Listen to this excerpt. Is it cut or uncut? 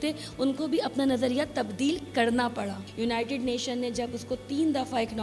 cut